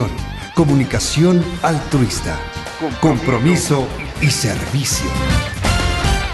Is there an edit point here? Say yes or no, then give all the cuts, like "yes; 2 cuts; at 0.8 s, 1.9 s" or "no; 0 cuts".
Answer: no; 0 cuts